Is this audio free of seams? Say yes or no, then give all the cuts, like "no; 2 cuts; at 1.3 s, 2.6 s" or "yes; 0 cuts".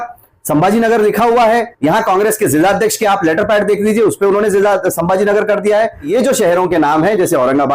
no; 2 cuts; at 1.7 s, 6.1 s